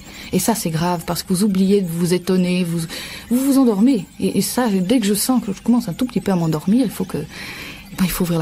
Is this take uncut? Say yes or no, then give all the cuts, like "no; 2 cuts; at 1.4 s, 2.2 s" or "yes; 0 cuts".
yes; 0 cuts